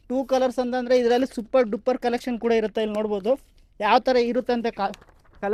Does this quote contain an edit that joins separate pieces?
no; 0 cuts

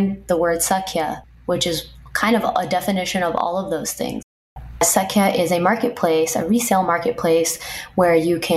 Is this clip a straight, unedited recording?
no; 1 cut; at 4.5 s

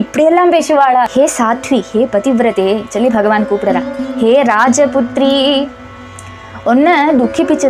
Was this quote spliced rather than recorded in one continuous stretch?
yes; 1 cut; at 1.1 s

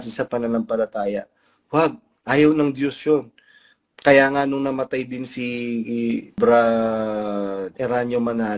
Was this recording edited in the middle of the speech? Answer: yes; 2 cuts; at 6.4 s, 7.7 s

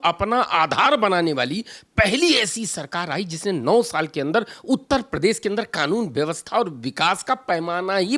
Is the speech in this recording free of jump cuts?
yes; 0 cuts

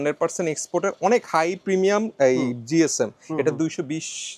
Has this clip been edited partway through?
no; 0 cuts

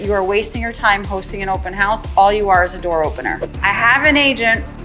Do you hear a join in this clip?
yes; 1 cut; at 3.5 s

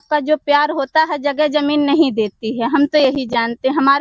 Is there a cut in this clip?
no; 0 cuts

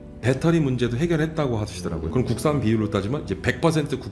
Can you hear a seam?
yes; 1 cut; at 2.1 s

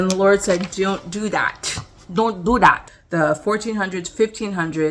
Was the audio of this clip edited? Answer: yes; 1 cut; at 3.0 s

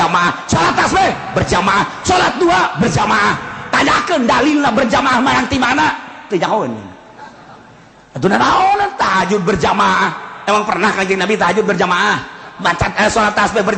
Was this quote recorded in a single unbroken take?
yes; 0 cuts

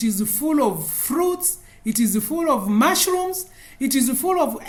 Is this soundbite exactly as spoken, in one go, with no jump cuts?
yes; 0 cuts

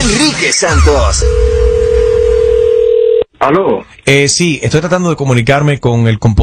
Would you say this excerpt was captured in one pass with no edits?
no; 1 cut; at 3.2 s

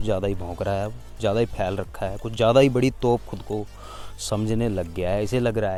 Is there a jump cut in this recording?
no; 0 cuts

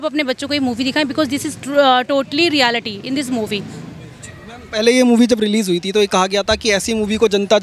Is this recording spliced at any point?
no; 0 cuts

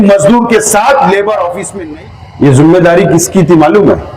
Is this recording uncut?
no; 1 cut; at 1.6 s

